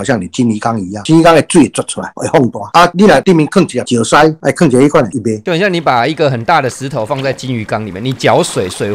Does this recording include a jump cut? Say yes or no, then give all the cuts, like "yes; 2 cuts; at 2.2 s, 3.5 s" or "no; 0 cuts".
yes; 4 cuts; at 0.9 s, 2.6 s, 3.8 s, 5.3 s